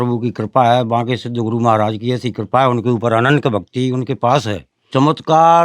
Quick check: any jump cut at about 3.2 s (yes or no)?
no